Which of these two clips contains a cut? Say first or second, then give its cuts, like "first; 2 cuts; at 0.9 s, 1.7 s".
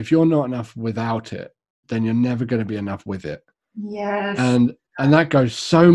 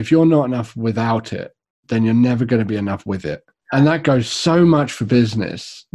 second; 1 cut; at 3.6 s